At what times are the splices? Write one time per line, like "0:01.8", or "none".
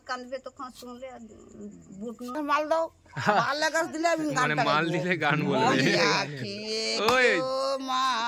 0:02.4